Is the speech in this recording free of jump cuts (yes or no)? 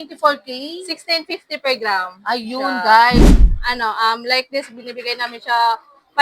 no